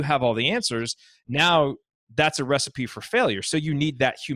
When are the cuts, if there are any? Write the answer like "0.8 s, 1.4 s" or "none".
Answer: none

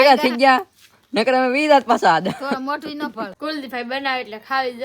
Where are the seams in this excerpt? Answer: 3.3 s

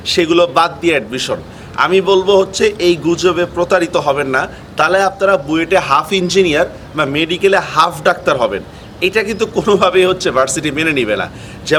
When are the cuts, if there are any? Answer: none

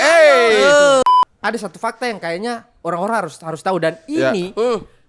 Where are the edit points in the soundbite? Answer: 1.0 s

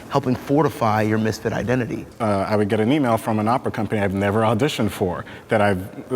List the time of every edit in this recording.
2.0 s

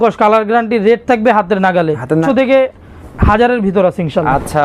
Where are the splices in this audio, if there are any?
2.2 s

